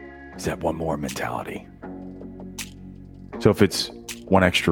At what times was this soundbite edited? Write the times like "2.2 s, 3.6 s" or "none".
1.8 s, 3.4 s